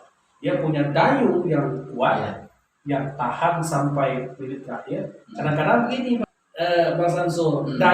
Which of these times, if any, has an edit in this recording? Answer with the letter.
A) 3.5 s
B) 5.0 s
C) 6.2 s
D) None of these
C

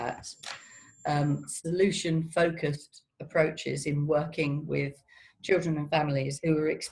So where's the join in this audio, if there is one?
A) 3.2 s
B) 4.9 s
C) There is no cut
C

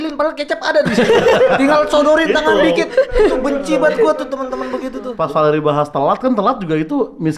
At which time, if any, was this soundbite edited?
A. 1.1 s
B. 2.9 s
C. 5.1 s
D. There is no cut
C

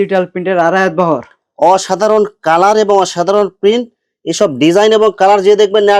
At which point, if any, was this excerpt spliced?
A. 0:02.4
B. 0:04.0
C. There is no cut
C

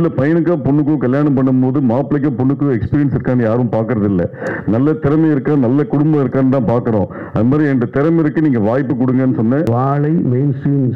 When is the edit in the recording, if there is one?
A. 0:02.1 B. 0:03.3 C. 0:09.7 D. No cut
C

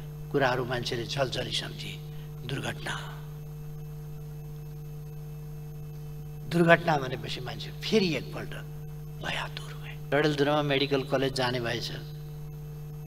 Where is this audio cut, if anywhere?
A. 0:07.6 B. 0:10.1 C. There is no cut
B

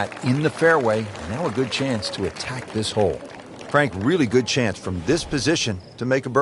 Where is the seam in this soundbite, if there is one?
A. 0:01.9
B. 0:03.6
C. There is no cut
B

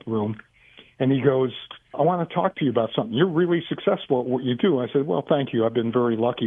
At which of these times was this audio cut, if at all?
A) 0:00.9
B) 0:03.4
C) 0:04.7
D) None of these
D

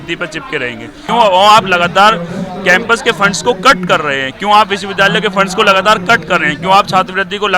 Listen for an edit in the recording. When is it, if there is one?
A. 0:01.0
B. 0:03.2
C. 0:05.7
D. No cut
A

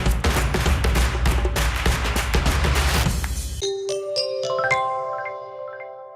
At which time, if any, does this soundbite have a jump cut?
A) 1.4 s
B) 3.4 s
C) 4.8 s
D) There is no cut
B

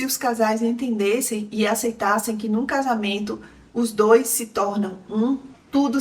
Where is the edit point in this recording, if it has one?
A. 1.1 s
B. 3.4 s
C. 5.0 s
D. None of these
D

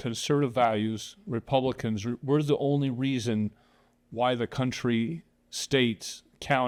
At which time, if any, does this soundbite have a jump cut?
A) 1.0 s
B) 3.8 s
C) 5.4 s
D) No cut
D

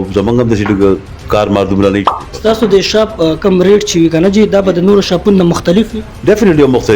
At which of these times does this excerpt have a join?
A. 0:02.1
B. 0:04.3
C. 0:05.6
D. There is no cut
A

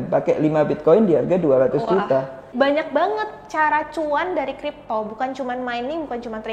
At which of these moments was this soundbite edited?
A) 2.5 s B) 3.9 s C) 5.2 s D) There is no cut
A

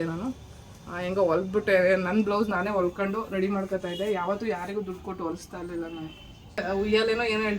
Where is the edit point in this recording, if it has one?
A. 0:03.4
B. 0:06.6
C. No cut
B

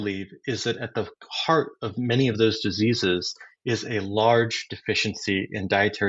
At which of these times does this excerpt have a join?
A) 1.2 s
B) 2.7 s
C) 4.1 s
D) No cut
D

